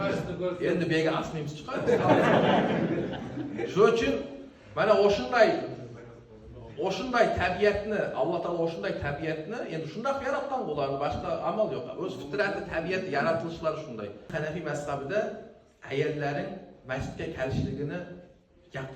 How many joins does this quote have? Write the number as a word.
one